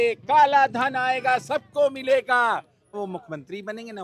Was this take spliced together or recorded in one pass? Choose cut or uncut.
cut